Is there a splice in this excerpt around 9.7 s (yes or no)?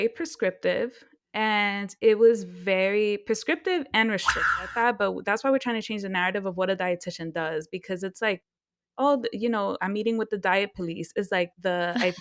no